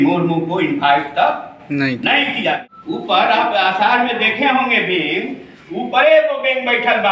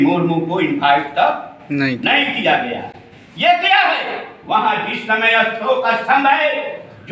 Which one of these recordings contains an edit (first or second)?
first